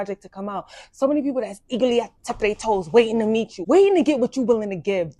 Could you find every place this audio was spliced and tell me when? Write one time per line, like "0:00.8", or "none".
none